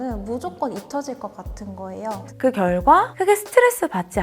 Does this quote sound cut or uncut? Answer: cut